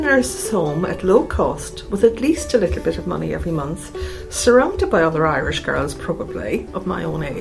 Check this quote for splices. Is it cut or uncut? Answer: uncut